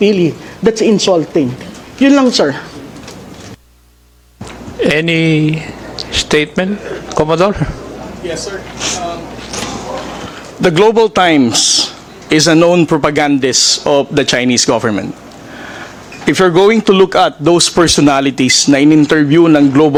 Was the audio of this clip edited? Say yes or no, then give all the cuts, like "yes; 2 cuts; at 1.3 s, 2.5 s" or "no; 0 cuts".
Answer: no; 0 cuts